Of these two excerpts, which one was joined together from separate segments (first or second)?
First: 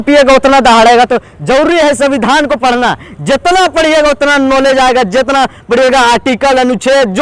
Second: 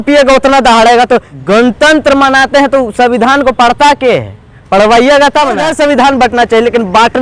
second